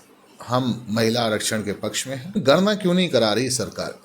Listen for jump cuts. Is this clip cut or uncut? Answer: cut